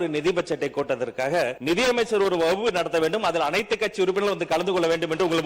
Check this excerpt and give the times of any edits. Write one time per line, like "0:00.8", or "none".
0:01.6